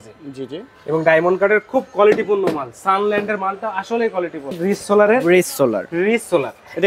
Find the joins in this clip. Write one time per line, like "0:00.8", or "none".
0:04.6